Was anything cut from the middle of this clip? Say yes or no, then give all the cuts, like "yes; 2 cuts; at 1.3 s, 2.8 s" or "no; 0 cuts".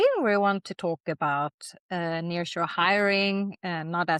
no; 0 cuts